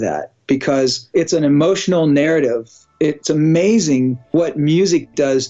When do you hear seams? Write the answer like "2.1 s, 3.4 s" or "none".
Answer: 1.1 s, 4.3 s